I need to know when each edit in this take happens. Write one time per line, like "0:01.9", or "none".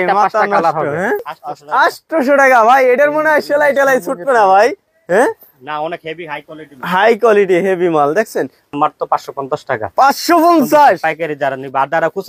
0:01.2
0:08.7